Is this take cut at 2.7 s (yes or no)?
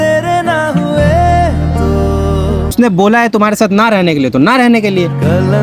yes